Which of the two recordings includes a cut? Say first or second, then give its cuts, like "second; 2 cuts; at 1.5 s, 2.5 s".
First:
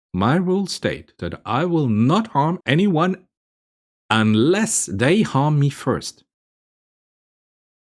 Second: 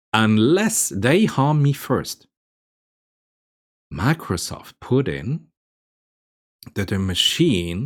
first; 1 cut; at 2.6 s